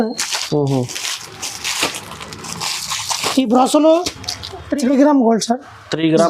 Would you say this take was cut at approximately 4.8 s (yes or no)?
yes